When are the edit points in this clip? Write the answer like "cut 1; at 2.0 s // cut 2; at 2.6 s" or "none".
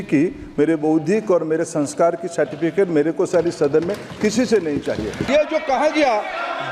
cut 1; at 5.2 s